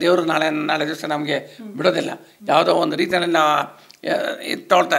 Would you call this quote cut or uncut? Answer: uncut